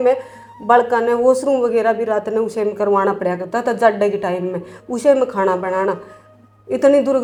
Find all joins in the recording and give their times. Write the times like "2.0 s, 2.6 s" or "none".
none